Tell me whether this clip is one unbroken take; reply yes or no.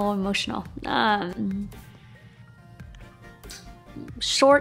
yes